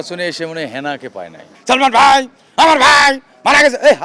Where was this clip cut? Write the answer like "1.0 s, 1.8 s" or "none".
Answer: 1.5 s